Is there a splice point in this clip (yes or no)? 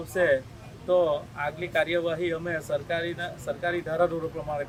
no